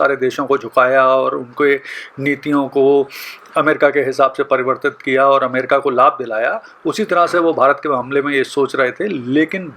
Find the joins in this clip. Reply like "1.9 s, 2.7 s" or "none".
none